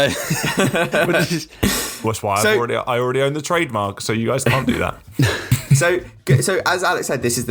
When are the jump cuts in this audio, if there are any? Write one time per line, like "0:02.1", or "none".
none